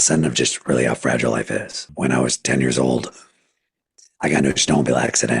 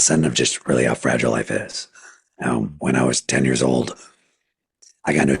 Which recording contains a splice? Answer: first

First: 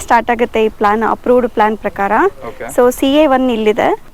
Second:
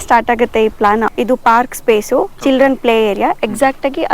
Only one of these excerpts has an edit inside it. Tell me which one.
second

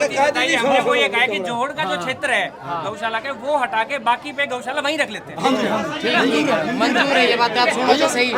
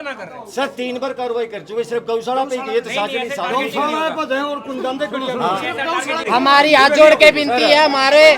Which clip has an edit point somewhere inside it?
second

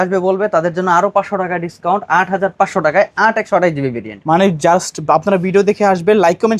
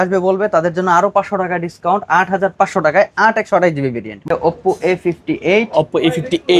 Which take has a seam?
second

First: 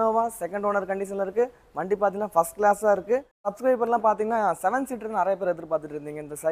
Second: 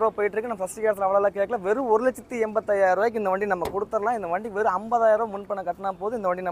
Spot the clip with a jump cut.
first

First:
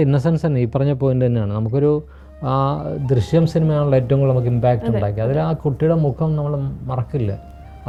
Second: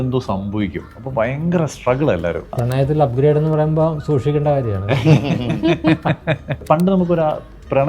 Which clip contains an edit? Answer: second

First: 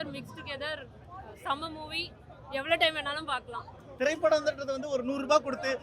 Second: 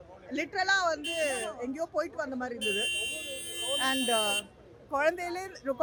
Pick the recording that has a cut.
first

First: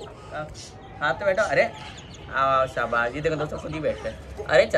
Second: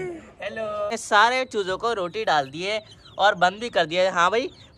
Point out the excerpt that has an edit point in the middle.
second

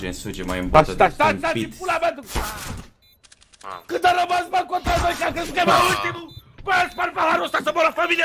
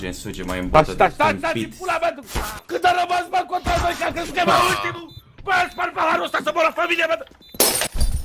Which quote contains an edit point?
second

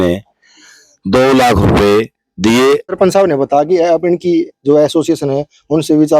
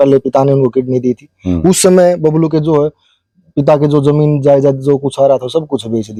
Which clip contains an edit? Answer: first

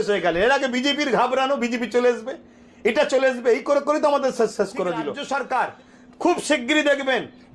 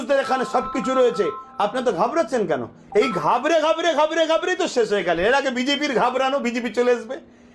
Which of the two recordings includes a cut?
first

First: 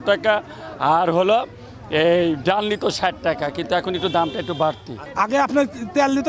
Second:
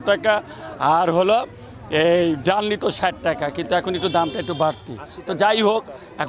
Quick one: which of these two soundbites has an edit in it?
first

